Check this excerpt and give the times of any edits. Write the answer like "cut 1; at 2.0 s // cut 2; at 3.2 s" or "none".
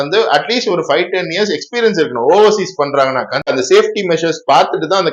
cut 1; at 3.5 s